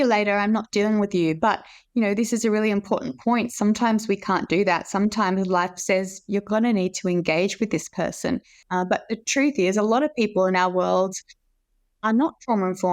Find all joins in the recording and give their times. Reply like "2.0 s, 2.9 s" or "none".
8.5 s